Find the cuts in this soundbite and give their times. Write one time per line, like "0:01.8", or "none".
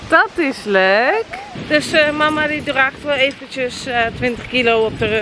0:01.5